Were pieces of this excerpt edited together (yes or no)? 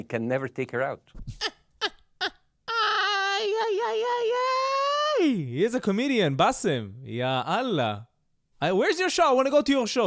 no